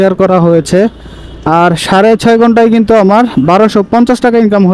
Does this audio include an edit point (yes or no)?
no